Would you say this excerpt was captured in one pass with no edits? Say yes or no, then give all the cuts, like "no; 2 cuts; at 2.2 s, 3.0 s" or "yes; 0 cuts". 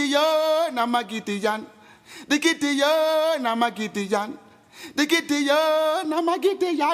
yes; 0 cuts